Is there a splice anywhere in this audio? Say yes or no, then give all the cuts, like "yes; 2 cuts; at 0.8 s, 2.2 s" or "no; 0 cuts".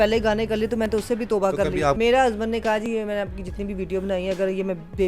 yes; 1 cut; at 2.0 s